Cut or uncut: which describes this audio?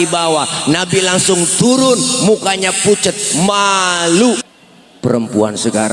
cut